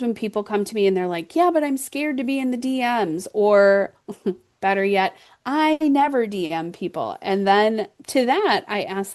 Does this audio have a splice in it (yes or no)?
no